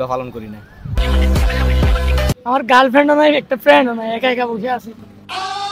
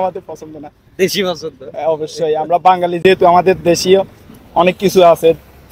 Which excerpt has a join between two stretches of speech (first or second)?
first